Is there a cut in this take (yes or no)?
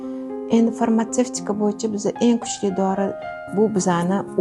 yes